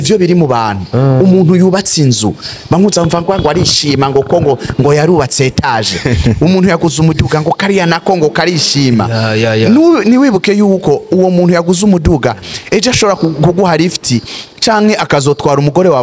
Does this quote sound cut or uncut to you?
uncut